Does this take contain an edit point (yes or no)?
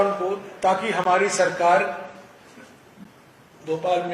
no